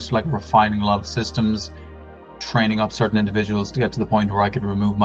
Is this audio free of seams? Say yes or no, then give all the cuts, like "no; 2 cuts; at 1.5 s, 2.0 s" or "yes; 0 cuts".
yes; 0 cuts